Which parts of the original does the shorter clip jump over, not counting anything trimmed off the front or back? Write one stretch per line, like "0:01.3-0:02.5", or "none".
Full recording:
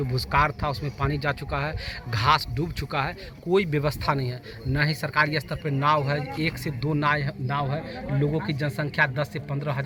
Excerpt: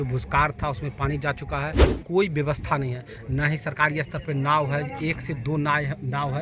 0:01.9-0:03.3